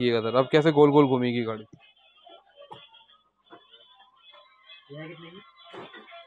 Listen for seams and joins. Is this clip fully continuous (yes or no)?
yes